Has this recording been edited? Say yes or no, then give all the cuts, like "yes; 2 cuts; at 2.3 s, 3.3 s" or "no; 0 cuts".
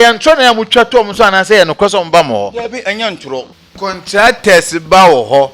yes; 1 cut; at 3.6 s